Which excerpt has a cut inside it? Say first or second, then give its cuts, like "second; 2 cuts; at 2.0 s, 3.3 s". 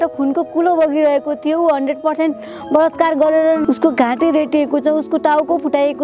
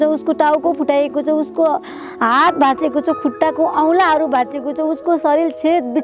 first; 1 cut; at 3.6 s